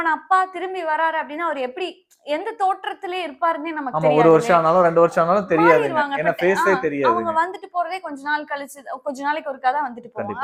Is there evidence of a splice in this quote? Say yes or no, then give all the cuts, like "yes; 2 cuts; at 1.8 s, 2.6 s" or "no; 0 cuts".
no; 0 cuts